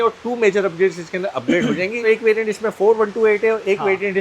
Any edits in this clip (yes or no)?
yes